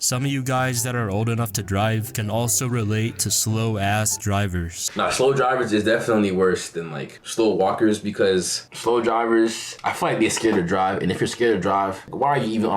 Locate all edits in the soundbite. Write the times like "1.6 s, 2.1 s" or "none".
4.9 s, 8.6 s